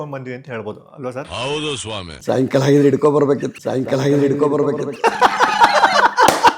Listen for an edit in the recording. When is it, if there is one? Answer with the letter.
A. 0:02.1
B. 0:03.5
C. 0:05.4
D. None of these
A